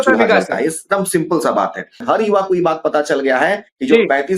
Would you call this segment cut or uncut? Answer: cut